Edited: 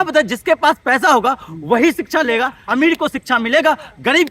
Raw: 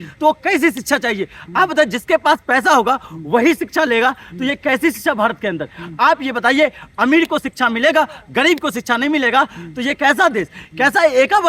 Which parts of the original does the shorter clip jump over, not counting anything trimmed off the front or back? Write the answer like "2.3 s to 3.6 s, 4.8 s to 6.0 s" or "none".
4.2 s to 6.9 s